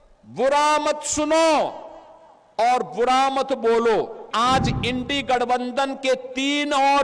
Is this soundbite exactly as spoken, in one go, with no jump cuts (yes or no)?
no